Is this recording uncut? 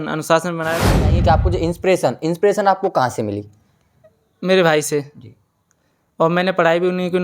no; 1 cut; at 1.2 s

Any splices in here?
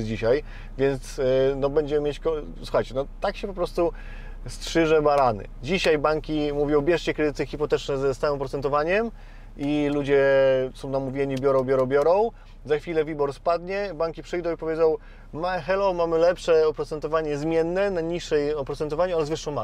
no; 0 cuts

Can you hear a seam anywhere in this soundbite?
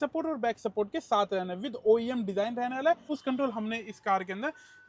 yes; 1 cut; at 3.1 s

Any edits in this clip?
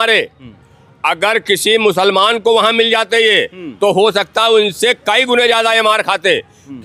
no; 0 cuts

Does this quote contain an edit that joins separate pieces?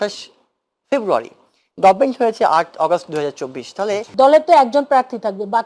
yes; 1 cut; at 4.0 s

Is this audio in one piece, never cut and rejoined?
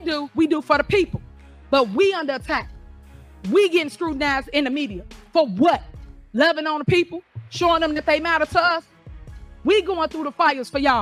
yes; 0 cuts

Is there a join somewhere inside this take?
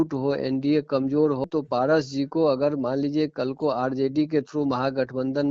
yes; 1 cut; at 1.4 s

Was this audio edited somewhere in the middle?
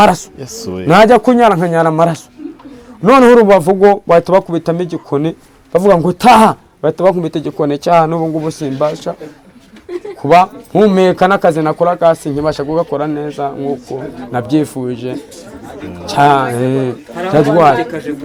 no; 0 cuts

